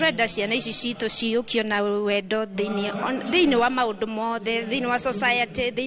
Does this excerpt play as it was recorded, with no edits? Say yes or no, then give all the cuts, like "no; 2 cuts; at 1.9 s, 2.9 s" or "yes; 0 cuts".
yes; 0 cuts